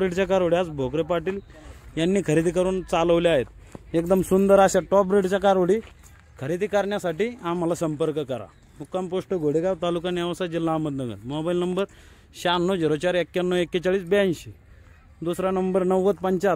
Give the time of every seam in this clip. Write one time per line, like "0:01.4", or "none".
none

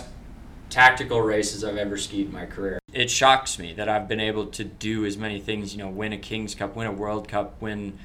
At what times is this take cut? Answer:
0:02.9

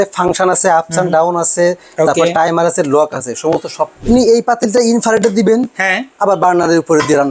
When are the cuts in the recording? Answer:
0:04.0

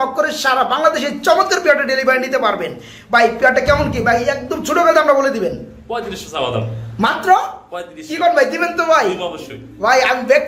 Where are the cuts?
none

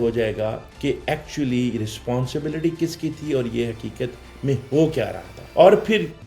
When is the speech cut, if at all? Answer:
none

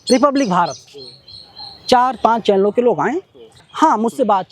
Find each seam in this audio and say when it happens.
0:03.6

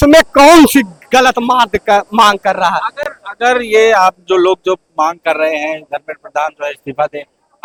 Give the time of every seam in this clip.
none

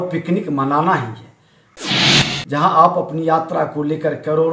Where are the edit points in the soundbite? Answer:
0:02.0

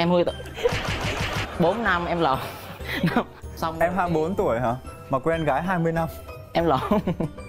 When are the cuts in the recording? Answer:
none

